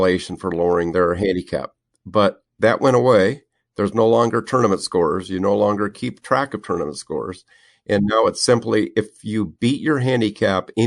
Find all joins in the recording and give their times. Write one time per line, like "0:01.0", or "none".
0:00.9